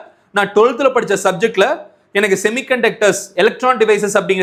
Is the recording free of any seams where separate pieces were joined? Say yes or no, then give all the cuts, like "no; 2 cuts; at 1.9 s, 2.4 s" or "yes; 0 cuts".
yes; 0 cuts